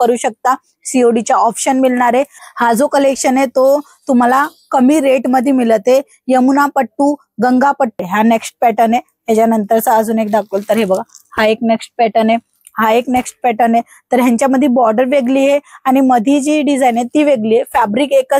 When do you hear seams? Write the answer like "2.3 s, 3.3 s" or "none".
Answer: 2.4 s, 8.0 s